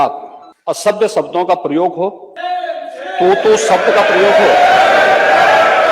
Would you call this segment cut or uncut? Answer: cut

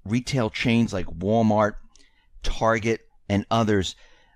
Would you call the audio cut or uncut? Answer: cut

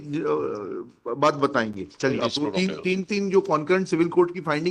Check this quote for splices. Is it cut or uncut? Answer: cut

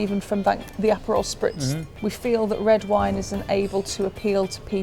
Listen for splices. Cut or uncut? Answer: cut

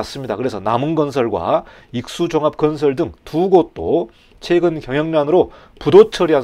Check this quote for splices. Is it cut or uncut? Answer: uncut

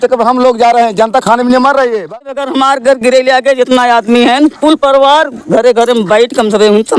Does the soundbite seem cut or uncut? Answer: cut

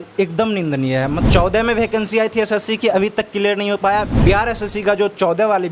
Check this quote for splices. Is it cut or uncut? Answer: cut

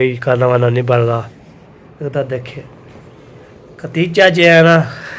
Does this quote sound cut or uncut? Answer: uncut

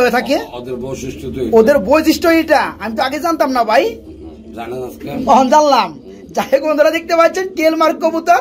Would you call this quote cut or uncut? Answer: uncut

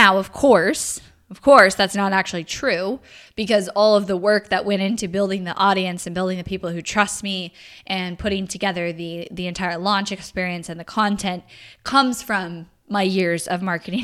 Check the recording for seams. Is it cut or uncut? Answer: uncut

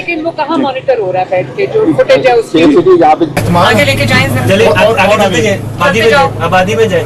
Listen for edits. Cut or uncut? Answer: cut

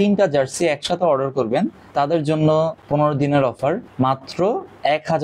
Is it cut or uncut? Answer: uncut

